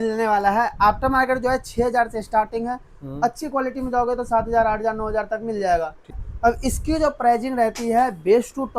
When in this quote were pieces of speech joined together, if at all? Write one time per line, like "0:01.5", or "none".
0:06.2